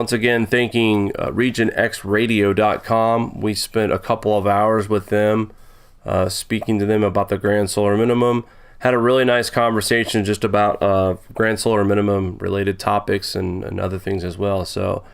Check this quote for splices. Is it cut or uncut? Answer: cut